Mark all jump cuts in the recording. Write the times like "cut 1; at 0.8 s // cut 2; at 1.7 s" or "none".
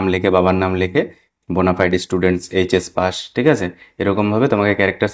cut 1; at 1.2 s